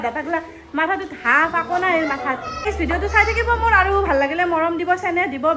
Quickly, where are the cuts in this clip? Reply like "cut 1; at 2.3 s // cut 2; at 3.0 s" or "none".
cut 1; at 2.7 s